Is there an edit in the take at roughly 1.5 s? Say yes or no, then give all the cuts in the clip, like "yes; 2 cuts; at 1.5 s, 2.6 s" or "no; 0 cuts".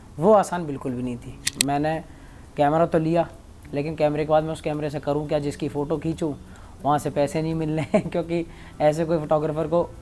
yes; 1 cut; at 1.5 s